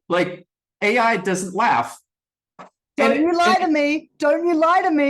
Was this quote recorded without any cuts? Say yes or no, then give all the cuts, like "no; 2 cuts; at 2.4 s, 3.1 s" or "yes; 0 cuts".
no; 1 cut; at 2.6 s